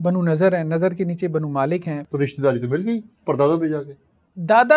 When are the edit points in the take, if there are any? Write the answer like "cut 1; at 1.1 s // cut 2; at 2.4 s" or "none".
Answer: cut 1; at 2.0 s